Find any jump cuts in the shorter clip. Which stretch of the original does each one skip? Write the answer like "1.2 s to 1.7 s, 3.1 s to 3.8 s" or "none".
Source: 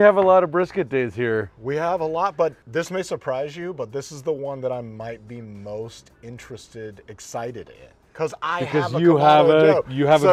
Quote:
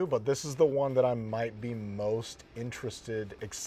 none